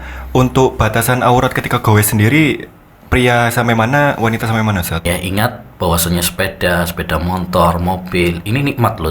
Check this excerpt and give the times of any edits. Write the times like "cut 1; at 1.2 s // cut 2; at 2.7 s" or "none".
cut 1; at 5.0 s

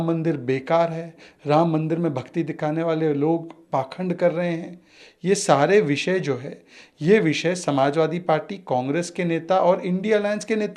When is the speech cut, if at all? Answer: none

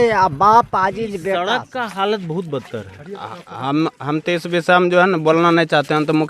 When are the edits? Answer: cut 1; at 1.4 s

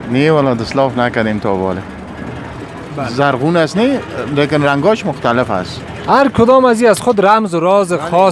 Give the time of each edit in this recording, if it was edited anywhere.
cut 1; at 2.5 s

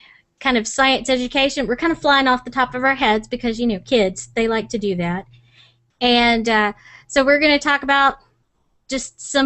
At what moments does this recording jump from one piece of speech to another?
cut 1; at 8.4 s

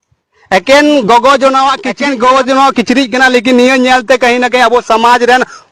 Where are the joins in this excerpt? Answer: cut 1; at 1.9 s

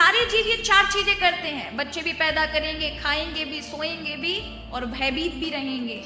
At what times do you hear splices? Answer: none

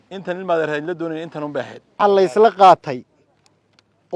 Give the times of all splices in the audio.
cut 1; at 1.9 s

